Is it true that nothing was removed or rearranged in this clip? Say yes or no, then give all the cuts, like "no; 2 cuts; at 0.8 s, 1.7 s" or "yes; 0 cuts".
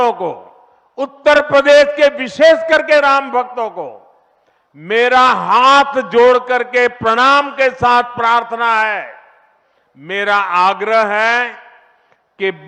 yes; 0 cuts